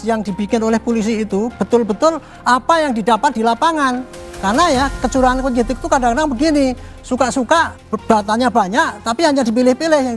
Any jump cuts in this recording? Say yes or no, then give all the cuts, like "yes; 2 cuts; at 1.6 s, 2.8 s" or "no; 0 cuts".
yes; 1 cut; at 7.9 s